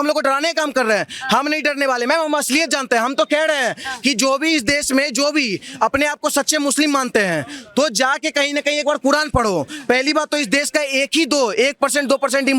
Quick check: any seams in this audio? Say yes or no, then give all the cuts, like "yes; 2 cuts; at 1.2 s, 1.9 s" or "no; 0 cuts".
no; 0 cuts